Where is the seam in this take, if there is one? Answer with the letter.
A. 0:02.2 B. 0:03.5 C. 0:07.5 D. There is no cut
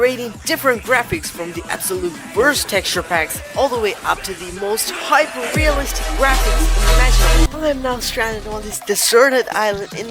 C